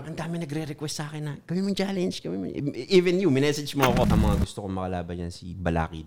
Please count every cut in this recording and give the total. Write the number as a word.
one